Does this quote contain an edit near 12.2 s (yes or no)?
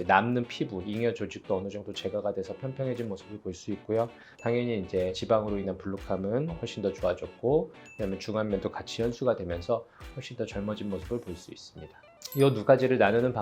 yes